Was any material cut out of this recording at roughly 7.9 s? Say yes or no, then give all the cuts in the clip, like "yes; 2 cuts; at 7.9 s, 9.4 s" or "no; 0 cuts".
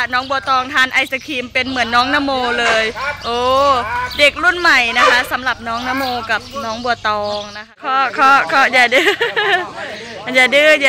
yes; 1 cut; at 7.9 s